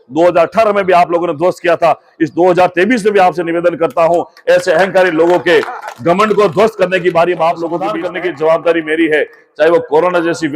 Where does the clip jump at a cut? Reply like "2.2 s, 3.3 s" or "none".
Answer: 7.9 s